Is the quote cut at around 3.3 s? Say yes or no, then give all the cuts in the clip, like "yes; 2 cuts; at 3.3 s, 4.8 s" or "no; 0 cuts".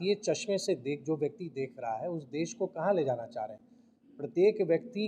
no; 0 cuts